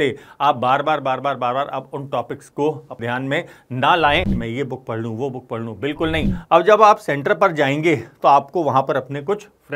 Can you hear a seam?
yes; 3 cuts; at 3.0 s, 4.4 s, 6.3 s

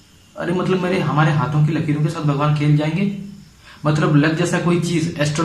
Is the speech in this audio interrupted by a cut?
no; 0 cuts

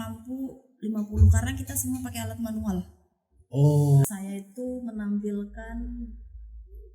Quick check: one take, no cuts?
no; 1 cut; at 4.1 s

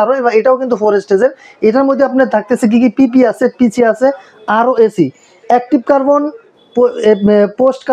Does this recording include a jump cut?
no; 0 cuts

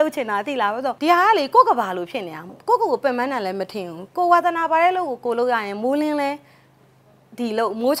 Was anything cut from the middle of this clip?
yes; 1 cut; at 0.9 s

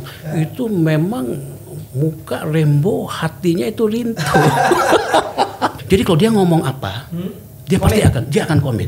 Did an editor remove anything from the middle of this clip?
yes; 1 cut; at 5.8 s

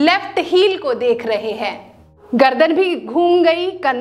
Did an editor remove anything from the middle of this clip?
yes; 1 cut; at 2.2 s

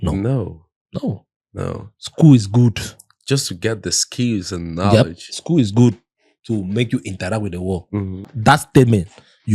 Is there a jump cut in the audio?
yes; 1 cut; at 8.3 s

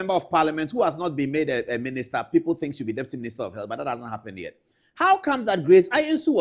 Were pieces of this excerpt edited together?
no; 0 cuts

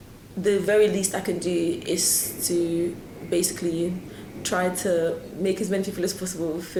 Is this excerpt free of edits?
yes; 0 cuts

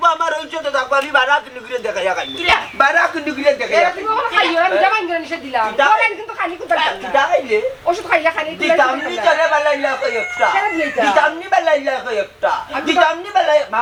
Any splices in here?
no; 0 cuts

